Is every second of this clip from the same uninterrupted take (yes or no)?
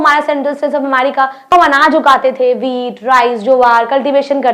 no